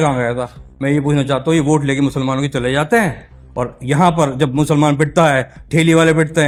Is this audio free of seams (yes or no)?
yes